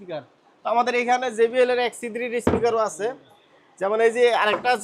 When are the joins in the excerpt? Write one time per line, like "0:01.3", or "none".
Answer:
none